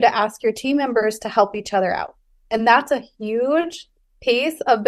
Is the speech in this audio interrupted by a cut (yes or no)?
no